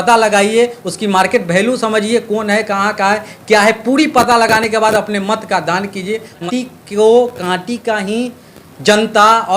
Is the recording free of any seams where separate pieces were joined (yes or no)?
no